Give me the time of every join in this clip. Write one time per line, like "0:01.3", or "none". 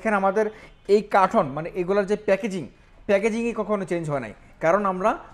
none